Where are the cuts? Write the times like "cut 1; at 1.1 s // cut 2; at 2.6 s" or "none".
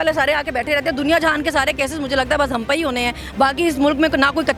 none